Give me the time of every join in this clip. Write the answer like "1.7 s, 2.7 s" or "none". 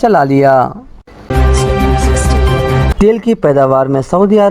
1.1 s, 2.9 s